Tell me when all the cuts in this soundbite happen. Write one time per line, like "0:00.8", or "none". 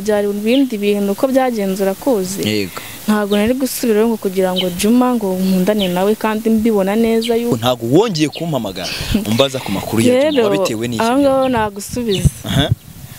0:07.5

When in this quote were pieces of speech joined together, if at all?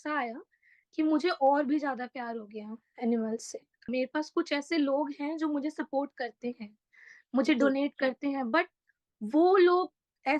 0:03.9

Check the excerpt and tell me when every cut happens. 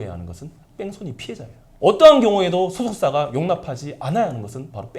0:01.6

